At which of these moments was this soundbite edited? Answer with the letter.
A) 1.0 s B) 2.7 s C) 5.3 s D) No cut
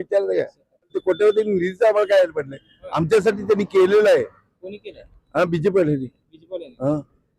A